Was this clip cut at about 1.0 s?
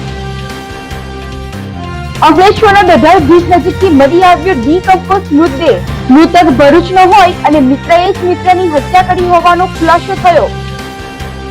yes; 1 cut; at 1.0 s

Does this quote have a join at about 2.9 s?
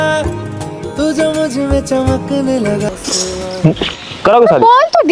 yes; 1 cut; at 2.9 s

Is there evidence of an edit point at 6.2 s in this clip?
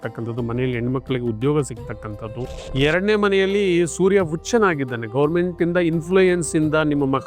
no; 1 cut; at 2.5 s

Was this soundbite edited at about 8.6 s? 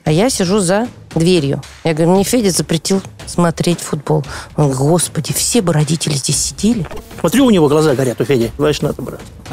yes; 2 cuts; at 7.0 s, 8.6 s

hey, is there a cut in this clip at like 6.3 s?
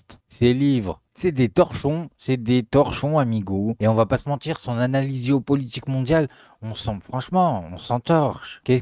no; 0 cuts

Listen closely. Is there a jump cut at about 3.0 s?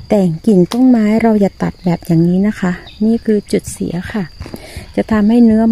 no; 0 cuts

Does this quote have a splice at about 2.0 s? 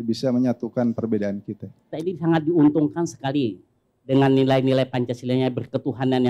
yes; 1 cut; at 2.0 s

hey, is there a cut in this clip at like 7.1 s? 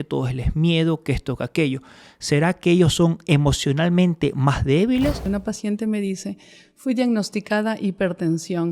no; 1 cut; at 5.2 s

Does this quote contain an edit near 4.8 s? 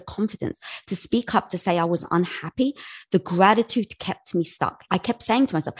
yes; 1 cut; at 4.8 s

